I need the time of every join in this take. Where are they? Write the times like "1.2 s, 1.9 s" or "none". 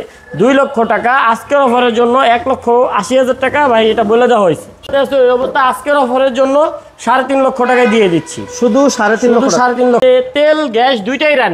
4.9 s, 10.0 s